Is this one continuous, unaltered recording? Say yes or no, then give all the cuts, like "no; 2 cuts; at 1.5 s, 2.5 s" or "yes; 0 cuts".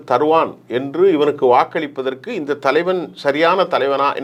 yes; 0 cuts